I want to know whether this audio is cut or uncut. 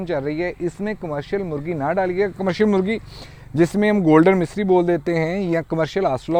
uncut